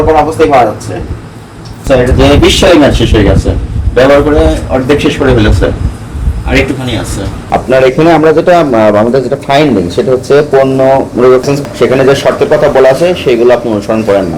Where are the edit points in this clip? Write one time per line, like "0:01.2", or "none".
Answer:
0:01.7
0:07.3